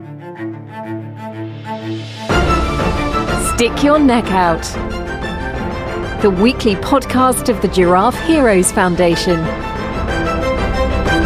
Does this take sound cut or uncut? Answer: uncut